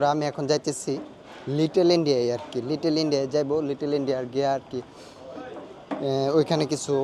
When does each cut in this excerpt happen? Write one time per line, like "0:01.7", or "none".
none